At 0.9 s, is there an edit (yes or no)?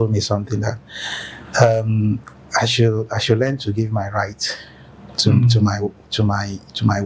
no